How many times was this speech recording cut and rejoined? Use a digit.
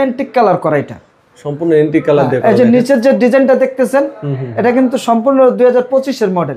0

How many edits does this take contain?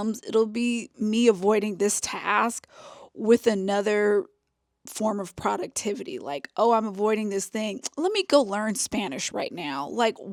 0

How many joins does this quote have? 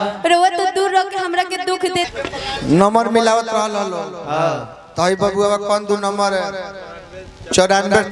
1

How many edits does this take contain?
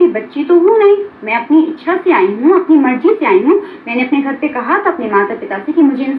0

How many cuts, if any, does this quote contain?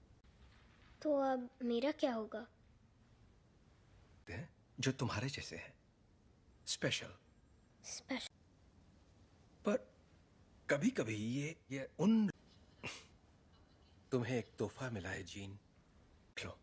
0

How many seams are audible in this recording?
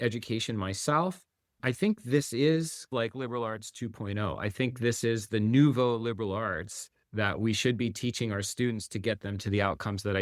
2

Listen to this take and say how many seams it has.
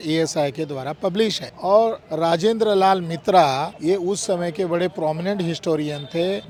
0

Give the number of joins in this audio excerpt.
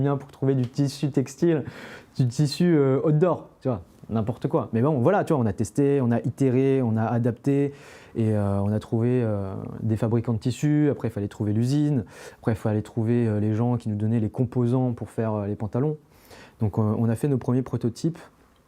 0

